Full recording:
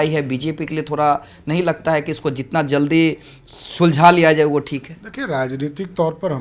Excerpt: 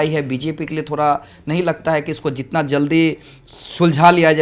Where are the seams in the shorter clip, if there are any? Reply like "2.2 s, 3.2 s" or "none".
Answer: none